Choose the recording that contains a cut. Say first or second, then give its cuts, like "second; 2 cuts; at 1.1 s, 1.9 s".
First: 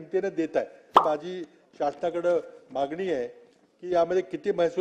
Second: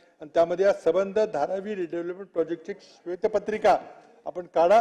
first; 1 cut; at 1.0 s